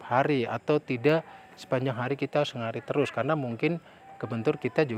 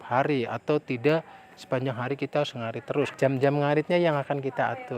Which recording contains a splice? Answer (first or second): second